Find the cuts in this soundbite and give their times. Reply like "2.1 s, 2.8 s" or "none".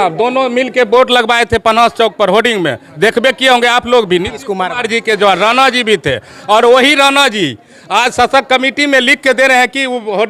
none